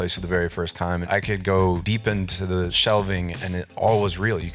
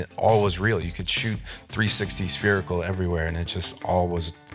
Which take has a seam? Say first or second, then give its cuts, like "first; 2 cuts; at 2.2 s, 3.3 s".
first; 2 cuts; at 1.0 s, 1.9 s